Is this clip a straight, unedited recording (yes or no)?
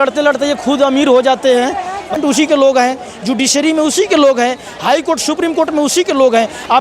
no